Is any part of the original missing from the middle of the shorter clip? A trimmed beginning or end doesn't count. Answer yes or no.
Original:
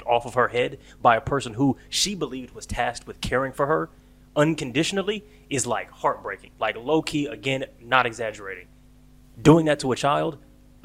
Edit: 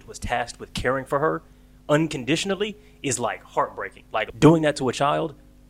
yes